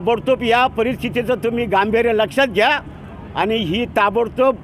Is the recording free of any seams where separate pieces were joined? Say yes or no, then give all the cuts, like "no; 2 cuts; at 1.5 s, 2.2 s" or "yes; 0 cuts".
yes; 0 cuts